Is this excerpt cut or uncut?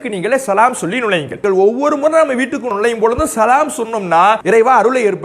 cut